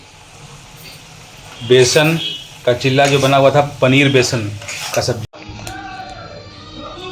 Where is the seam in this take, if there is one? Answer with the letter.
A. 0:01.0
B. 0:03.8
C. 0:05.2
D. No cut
C